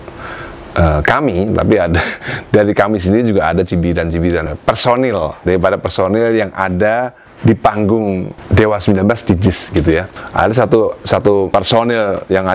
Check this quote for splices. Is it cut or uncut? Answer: cut